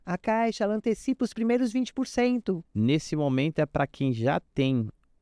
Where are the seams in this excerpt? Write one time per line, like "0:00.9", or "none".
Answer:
0:02.7